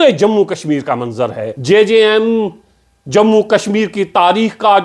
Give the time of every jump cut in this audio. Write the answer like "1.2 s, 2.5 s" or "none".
1.5 s